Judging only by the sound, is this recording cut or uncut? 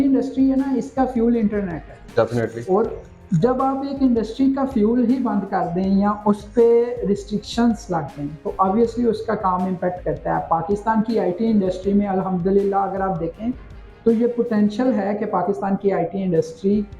uncut